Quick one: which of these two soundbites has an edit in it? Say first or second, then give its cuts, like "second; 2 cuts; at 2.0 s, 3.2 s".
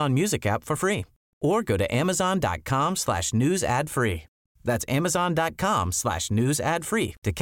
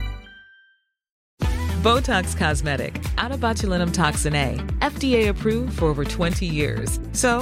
second; 1 cut; at 1.2 s